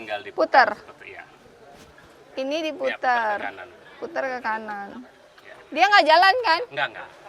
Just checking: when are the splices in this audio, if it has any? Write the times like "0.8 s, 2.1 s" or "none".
none

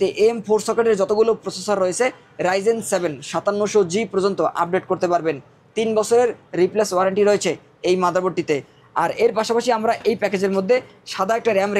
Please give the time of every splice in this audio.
none

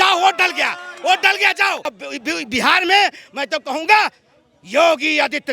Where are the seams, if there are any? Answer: 2.0 s

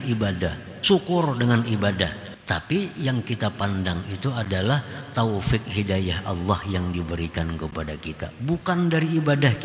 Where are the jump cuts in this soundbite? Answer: 2.3 s

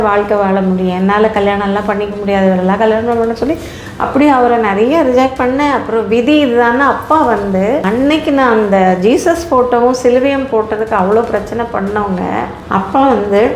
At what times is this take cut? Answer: 7.8 s, 12.6 s

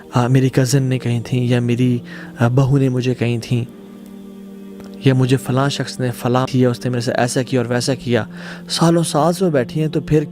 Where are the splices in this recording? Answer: none

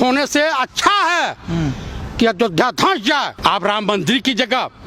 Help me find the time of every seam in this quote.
3.3 s

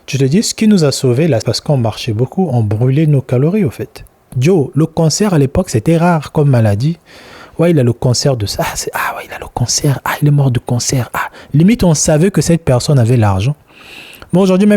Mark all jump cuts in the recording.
1.5 s, 4.3 s

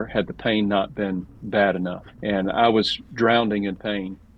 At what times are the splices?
none

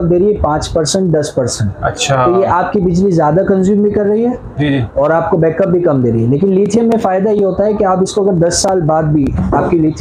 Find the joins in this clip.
none

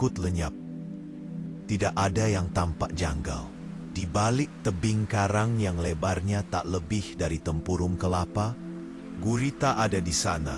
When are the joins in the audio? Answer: 9.0 s

